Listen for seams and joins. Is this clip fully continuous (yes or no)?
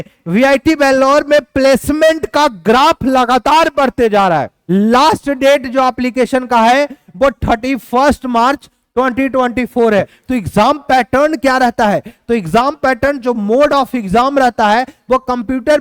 no